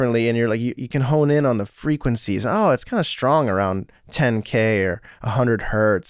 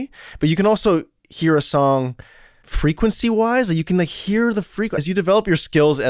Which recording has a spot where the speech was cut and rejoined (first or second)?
second